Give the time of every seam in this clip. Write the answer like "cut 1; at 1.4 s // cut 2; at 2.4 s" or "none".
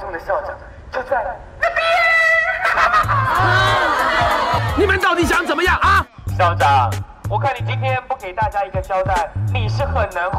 cut 1; at 4.6 s